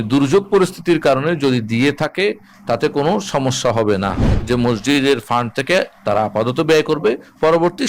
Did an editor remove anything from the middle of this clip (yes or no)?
yes